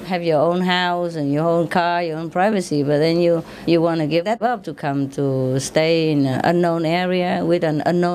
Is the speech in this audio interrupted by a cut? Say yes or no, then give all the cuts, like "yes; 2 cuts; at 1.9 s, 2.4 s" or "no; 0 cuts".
no; 0 cuts